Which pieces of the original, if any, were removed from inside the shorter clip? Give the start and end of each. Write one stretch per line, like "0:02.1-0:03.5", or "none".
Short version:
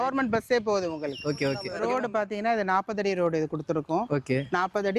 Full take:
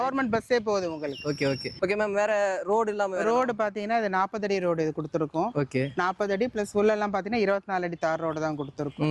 0:01.7-0:03.2